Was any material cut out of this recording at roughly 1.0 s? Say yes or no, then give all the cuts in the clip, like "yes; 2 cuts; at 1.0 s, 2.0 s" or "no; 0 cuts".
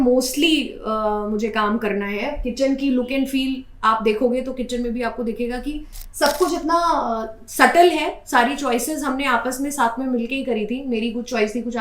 no; 0 cuts